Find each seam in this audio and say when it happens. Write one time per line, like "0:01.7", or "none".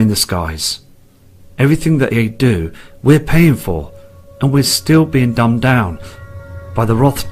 0:01.4